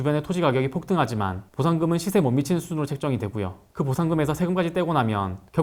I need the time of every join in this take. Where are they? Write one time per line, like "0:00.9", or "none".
none